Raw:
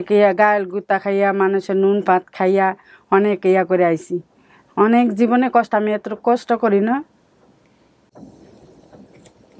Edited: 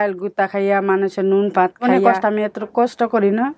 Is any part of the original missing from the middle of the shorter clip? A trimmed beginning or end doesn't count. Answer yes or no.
yes